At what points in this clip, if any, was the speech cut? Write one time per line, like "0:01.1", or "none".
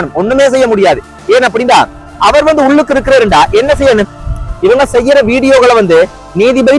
none